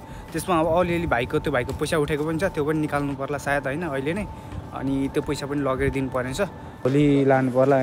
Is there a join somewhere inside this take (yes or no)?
yes